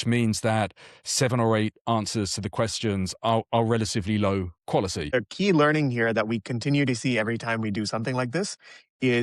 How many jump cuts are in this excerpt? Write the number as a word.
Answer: one